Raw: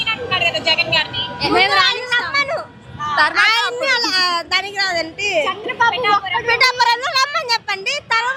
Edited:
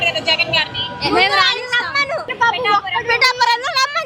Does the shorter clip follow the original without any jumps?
no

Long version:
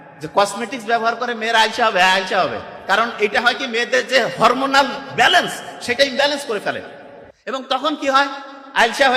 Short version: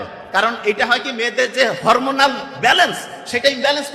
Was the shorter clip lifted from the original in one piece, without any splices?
yes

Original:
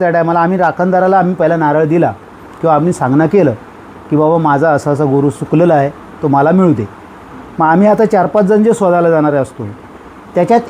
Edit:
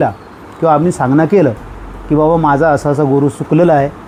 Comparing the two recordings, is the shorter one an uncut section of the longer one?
yes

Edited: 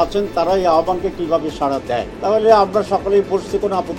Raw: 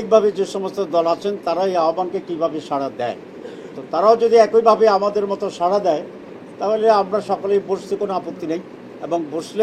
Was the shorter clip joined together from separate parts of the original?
yes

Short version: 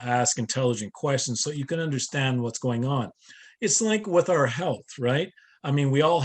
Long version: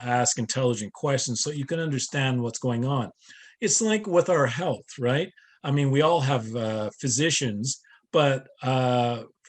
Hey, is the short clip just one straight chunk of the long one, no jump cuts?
yes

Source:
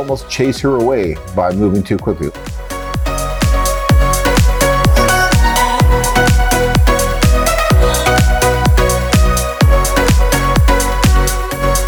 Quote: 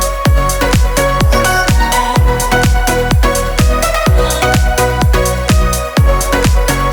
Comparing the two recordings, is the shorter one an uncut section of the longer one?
yes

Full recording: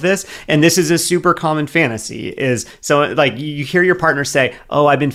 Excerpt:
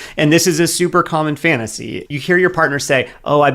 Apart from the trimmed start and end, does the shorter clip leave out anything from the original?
yes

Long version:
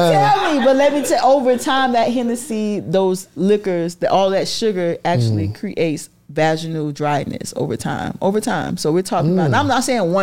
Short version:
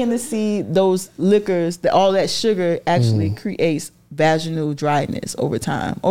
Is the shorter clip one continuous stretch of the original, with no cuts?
yes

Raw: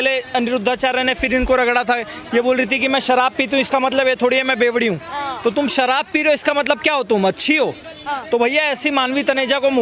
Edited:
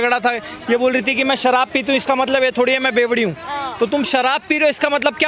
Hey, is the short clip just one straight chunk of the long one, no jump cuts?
yes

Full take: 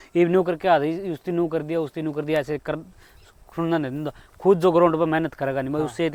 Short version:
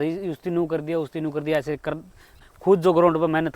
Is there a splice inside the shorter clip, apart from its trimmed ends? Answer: yes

